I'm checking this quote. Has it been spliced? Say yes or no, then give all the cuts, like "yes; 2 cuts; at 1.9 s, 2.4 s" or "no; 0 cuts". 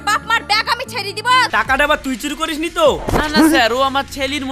yes; 1 cut; at 1.5 s